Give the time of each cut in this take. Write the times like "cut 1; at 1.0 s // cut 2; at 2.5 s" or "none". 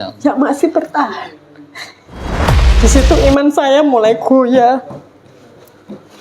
cut 1; at 2.5 s